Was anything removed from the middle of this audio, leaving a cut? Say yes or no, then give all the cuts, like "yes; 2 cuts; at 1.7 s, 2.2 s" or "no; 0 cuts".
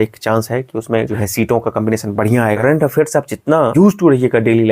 yes; 3 cuts; at 1.2 s, 2.6 s, 3.7 s